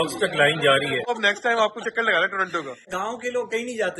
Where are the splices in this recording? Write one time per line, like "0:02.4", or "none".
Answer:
0:01.1
0:02.9